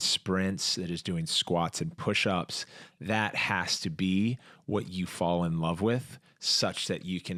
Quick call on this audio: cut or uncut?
uncut